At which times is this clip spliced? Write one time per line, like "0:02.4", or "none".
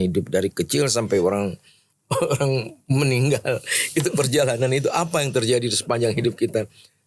none